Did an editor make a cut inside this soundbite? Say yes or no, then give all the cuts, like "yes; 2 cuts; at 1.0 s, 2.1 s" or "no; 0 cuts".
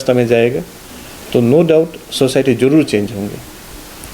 no; 0 cuts